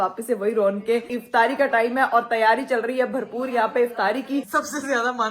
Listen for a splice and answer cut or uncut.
cut